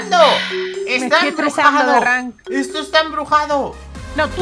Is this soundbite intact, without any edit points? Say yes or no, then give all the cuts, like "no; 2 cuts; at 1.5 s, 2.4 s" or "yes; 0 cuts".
yes; 0 cuts